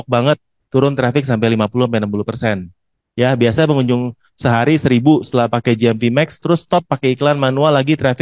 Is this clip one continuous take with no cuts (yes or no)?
yes